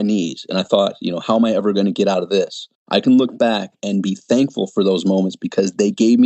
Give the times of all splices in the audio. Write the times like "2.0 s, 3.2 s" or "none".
3.8 s